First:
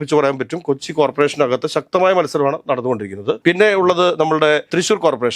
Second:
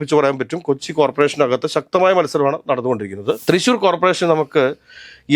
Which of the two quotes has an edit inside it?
second; 1 cut; at 3.4 s

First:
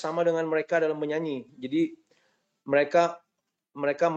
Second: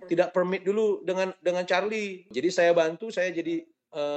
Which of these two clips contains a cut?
second; 1 cut; at 2.3 s

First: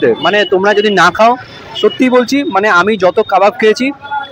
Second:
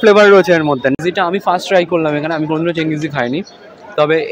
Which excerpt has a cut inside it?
second; 1 cut; at 1.0 s

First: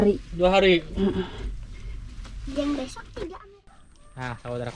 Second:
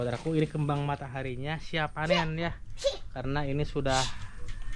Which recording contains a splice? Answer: first; 1 cut; at 3.4 s

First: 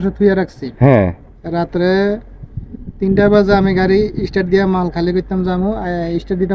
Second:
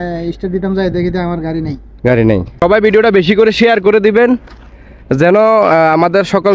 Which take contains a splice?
second; 1 cut; at 2.5 s

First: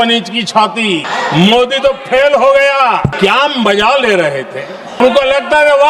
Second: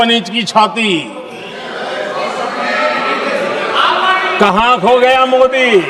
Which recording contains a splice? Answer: first; 3 cuts; at 1.1 s, 3.1 s, 5.0 s

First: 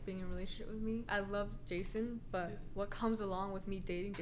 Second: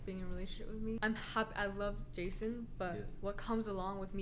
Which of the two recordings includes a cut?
first; 1 cut; at 1.0 s

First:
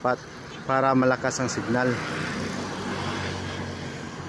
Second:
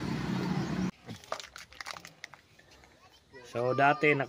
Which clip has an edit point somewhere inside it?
second; 1 cut; at 1.0 s

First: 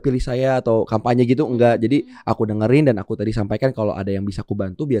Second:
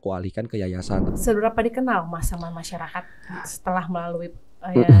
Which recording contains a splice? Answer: second; 1 cut; at 1.1 s

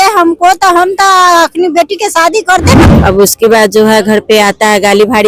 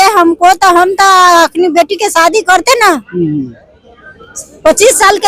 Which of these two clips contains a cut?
first; 1 cut; at 2.8 s

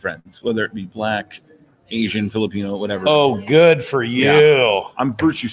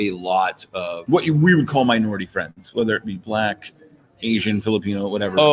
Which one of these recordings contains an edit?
second; 1 cut; at 1.0 s

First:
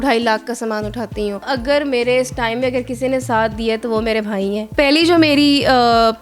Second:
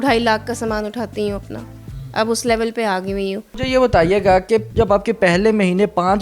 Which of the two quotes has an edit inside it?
first; 2 cuts; at 1.4 s, 4.7 s

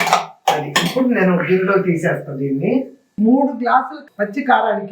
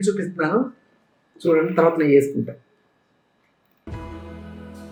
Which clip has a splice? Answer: first; 1 cut; at 3.0 s

